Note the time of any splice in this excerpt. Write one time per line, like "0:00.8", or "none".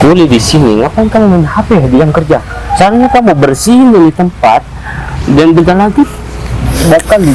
none